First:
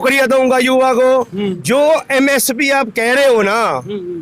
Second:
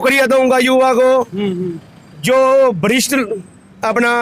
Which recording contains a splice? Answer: first; 1 cut; at 1.6 s

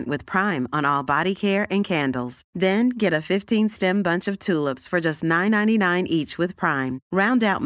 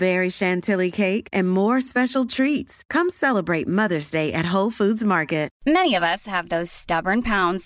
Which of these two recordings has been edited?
second; 1 cut; at 5.5 s

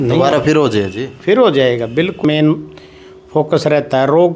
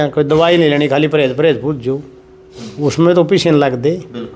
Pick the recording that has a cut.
first; 1 cut; at 2.2 s

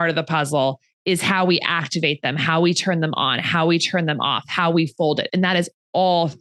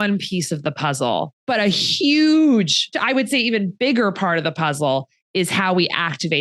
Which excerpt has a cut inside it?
second; 2 cuts; at 1.4 s, 3.0 s

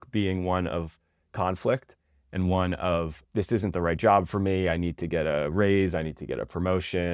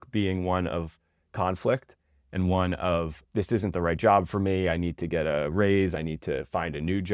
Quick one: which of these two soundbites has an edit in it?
second; 1 cut; at 6.0 s

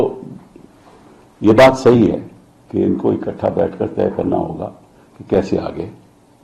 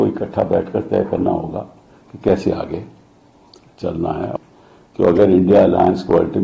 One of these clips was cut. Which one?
second; 1 cut; at 4.3 s

